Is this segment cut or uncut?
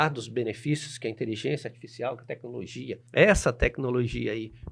cut